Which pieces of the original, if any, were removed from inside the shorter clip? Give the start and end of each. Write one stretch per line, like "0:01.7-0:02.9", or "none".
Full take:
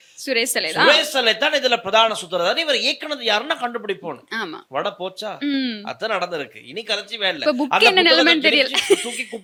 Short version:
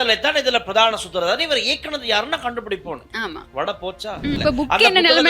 0:05.5-0:07.4